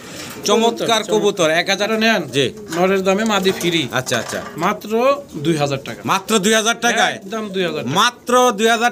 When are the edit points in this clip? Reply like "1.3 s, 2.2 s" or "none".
1.9 s